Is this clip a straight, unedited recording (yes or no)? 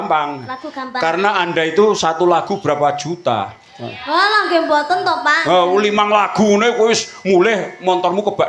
yes